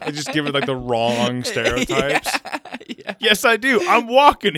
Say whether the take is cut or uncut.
cut